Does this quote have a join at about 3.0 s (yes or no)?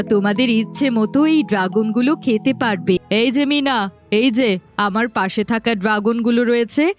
yes